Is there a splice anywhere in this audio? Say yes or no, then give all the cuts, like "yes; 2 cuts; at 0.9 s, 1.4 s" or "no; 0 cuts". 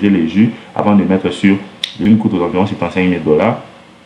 yes; 1 cut; at 2.0 s